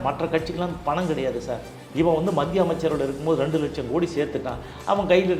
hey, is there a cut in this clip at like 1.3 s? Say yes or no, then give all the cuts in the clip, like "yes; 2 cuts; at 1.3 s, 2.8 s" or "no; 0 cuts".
no; 0 cuts